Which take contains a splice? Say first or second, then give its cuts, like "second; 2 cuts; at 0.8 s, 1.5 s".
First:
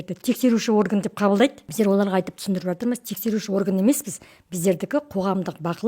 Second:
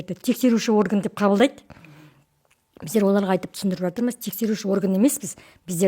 first; 1 cut; at 1.6 s